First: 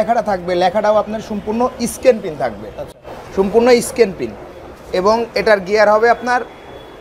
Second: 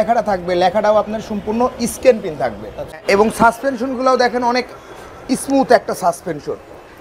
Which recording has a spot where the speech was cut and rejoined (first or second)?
second